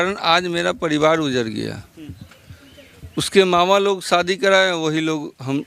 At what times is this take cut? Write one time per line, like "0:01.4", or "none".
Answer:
none